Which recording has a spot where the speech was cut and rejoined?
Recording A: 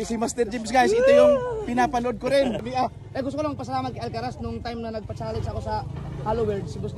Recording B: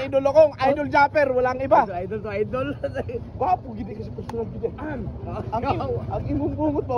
A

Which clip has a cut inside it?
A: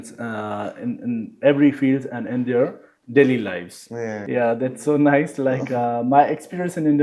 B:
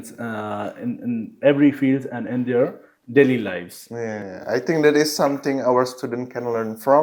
A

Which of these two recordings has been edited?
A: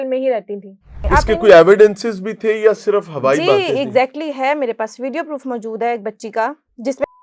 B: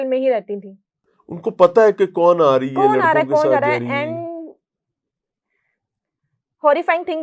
A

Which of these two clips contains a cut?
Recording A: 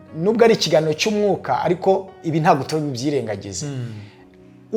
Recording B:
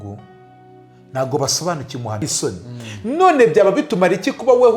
B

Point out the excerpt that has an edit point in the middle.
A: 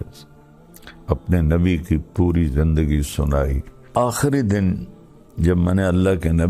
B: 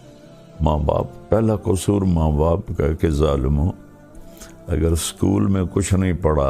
A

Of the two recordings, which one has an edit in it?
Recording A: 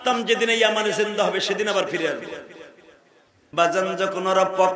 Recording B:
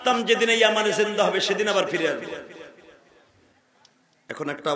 A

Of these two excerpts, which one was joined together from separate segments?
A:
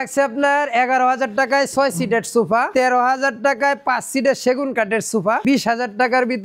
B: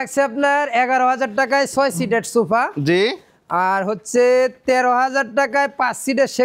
A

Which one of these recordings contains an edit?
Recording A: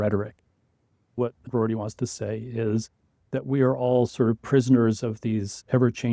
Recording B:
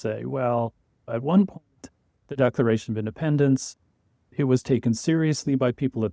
A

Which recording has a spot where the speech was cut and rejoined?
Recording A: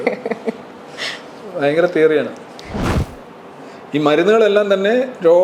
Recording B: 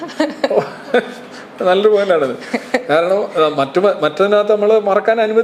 A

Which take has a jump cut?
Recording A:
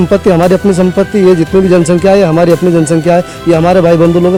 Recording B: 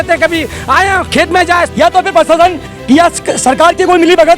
B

